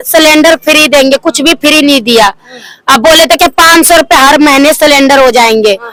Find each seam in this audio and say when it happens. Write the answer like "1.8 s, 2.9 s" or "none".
none